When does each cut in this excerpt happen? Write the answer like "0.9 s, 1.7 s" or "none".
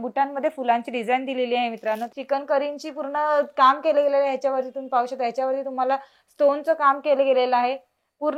2.1 s

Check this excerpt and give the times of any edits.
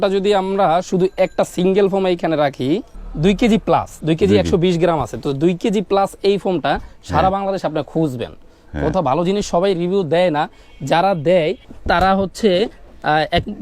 3.0 s, 11.6 s

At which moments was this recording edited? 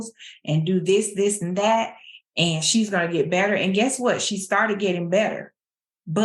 none

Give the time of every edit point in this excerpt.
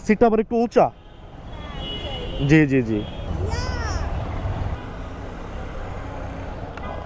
none

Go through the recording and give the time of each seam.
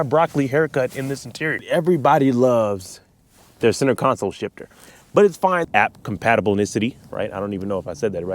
1.6 s, 5.6 s

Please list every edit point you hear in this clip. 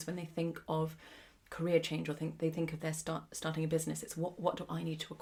none

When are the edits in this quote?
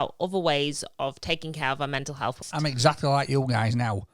2.4 s

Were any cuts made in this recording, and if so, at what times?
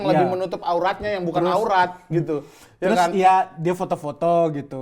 none

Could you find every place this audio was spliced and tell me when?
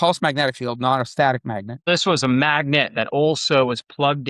1.9 s

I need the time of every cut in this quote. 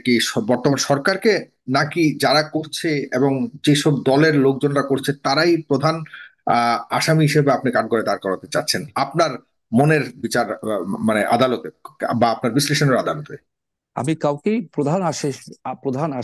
none

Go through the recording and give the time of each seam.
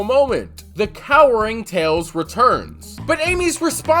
3.0 s

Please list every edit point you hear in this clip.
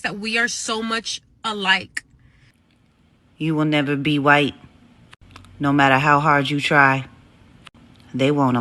2.7 s

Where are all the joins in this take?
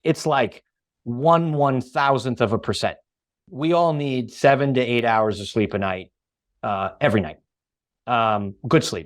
3.5 s

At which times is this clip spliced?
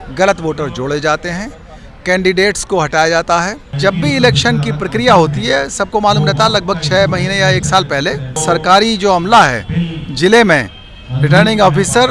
3.6 s, 8.4 s

